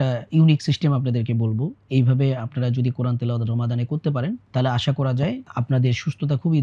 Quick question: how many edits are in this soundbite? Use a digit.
2